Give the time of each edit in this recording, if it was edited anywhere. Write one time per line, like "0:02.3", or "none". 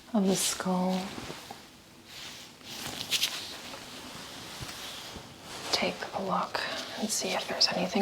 0:05.6